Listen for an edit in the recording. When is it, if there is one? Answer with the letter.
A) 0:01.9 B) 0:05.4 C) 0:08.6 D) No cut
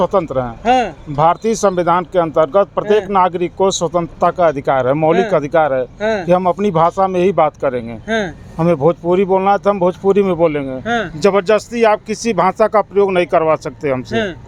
D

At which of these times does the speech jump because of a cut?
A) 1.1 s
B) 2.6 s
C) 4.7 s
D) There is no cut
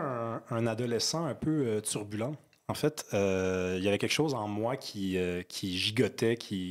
D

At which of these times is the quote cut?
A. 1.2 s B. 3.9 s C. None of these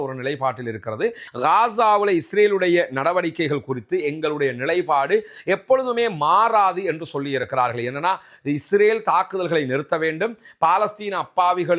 A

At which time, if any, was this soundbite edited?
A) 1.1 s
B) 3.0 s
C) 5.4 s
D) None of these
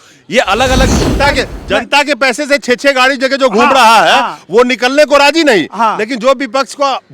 A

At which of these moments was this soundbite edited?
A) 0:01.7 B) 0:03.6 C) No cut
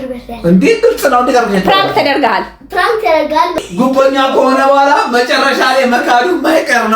B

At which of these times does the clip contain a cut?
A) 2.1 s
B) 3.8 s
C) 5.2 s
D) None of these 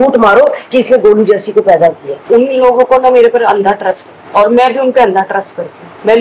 A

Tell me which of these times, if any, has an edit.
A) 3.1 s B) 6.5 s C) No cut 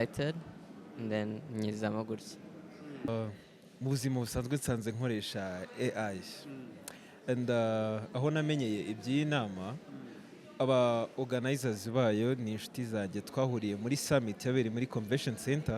A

